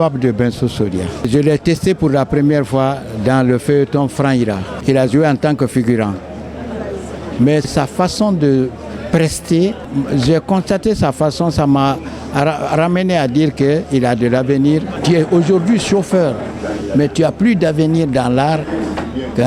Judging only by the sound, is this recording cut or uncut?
cut